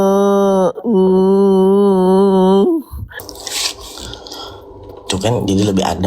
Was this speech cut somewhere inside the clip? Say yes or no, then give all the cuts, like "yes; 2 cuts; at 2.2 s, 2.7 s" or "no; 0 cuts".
yes; 1 cut; at 3.2 s